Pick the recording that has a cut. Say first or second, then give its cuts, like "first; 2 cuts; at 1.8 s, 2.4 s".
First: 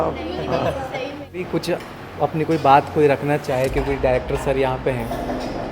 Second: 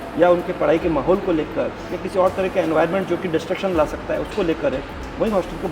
first; 1 cut; at 1.5 s